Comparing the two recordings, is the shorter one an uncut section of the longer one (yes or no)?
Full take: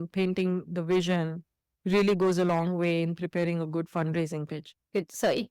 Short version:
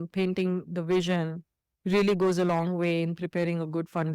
yes